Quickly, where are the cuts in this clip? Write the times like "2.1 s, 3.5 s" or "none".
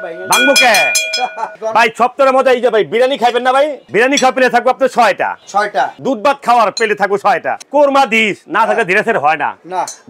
1.5 s, 3.8 s, 6.0 s, 7.6 s